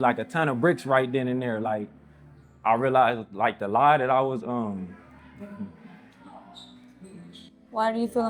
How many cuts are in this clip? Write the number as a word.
zero